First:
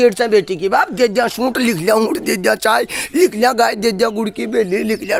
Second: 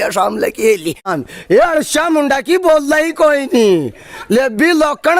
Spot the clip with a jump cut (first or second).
second